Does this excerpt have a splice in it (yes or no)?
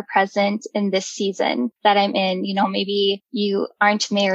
yes